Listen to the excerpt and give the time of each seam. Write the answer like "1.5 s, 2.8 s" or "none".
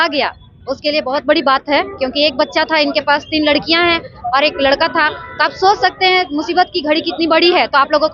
none